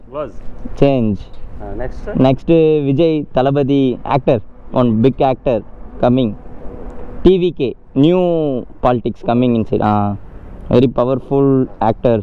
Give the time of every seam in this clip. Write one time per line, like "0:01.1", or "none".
none